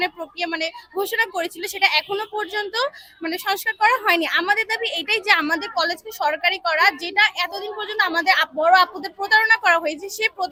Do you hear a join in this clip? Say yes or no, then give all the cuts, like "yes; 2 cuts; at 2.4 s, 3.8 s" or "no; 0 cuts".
no; 0 cuts